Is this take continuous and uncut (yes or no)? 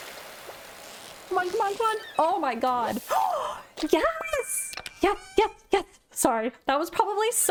yes